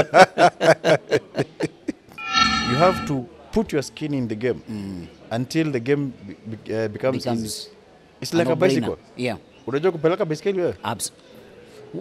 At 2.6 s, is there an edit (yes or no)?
yes